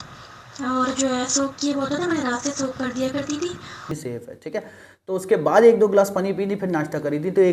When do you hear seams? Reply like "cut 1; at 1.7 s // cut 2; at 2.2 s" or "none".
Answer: cut 1; at 3.9 s